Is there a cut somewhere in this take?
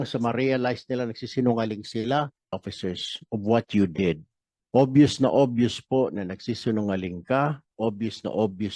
yes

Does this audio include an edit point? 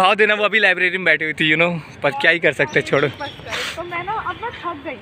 no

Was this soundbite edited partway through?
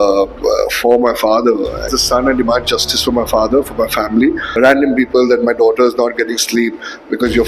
yes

